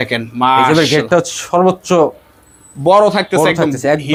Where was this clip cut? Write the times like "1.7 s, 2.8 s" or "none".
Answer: none